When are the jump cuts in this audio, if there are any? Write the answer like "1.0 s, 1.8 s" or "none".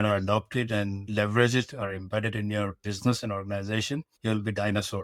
1.0 s, 4.1 s